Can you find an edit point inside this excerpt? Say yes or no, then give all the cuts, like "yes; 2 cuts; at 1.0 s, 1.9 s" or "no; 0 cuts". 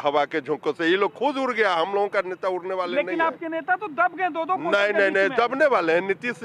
no; 0 cuts